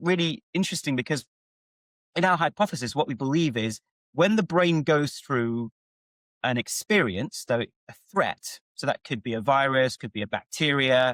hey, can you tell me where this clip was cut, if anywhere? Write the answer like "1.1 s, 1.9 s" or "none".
none